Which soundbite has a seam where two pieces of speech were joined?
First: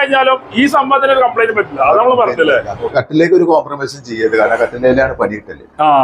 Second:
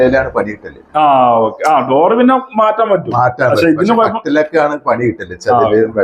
first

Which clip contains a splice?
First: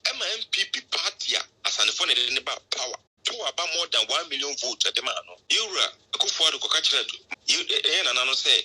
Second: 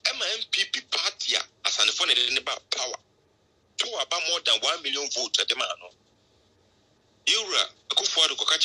first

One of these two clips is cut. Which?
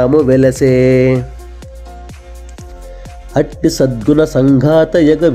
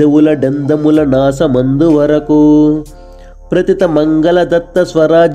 first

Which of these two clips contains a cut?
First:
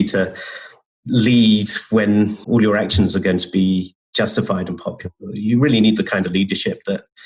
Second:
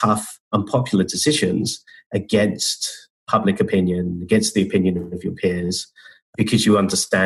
first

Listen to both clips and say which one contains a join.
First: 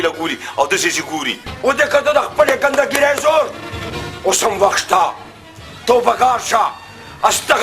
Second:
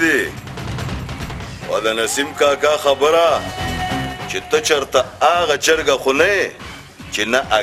first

